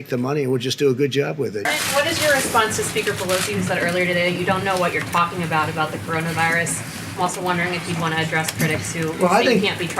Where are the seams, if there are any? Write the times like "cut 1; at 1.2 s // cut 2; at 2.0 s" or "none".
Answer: cut 1; at 1.6 s

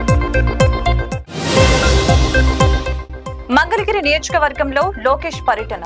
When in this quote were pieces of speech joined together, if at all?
cut 1; at 3.0 s

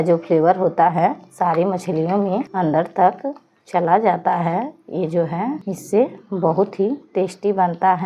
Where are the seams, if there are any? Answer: cut 1; at 2.5 s // cut 2; at 5.7 s

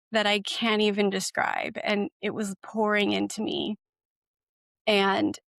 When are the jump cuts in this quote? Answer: none

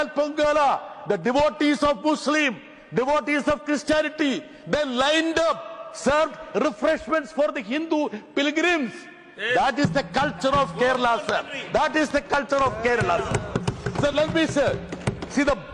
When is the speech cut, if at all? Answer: none

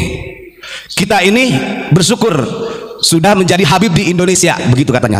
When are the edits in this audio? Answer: none

